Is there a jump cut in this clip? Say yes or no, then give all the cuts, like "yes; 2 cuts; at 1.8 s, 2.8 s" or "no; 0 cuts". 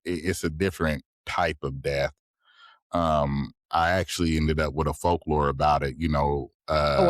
no; 0 cuts